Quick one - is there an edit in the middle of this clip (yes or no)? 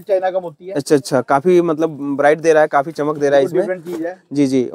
no